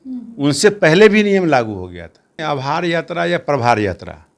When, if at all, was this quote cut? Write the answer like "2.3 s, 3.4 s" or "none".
2.4 s